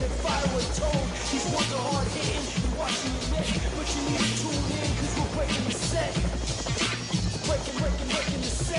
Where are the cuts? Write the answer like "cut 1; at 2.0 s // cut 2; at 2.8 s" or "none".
cut 1; at 3.6 s

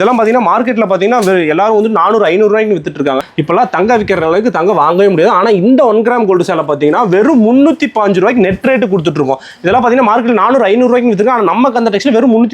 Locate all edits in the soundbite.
cut 1; at 3.2 s

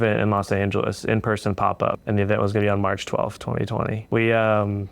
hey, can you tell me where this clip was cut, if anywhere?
cut 1; at 2.0 s // cut 2; at 4.0 s

